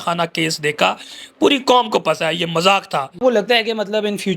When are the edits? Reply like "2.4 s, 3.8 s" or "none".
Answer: 3.2 s